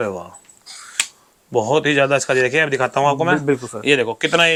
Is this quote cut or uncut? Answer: uncut